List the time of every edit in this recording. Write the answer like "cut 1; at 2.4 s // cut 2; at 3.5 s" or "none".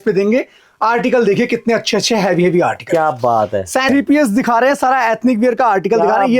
cut 1; at 3.9 s